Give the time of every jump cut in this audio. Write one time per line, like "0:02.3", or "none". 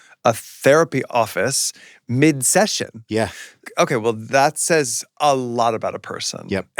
0:01.1
0:03.6